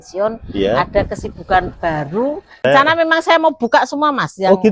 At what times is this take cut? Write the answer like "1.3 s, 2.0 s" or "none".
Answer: 2.5 s